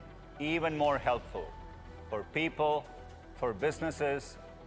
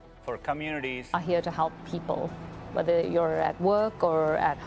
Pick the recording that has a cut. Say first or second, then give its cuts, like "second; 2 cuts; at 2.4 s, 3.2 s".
second; 1 cut; at 1.0 s